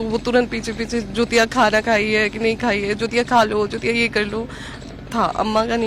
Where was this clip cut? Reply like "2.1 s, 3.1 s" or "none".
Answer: none